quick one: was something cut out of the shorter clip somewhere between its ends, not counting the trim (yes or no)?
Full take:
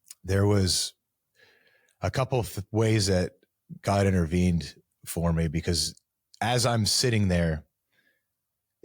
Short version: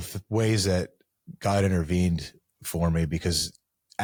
no